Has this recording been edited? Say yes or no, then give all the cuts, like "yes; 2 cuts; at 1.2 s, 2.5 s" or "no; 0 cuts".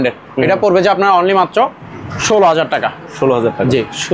no; 0 cuts